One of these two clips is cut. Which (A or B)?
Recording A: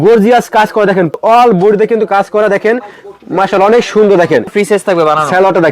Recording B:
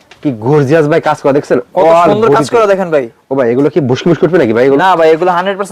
A